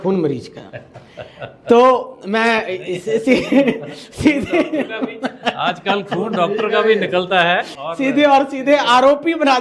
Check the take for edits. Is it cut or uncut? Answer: cut